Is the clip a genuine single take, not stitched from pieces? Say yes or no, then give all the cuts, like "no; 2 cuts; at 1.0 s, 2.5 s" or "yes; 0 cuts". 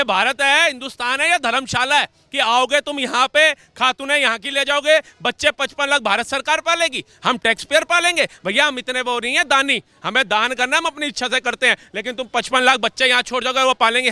yes; 0 cuts